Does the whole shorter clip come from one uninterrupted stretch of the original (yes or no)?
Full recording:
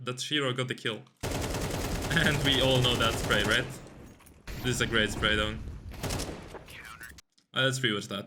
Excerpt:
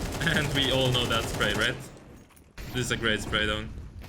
yes